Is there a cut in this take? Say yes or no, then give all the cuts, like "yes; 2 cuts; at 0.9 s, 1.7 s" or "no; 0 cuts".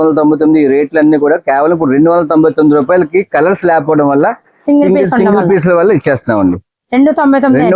no; 0 cuts